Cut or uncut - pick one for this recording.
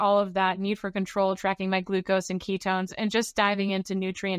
uncut